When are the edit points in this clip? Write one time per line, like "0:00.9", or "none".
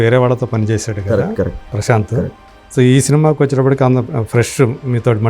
none